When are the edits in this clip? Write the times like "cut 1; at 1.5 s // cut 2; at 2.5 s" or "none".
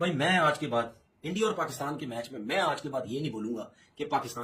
none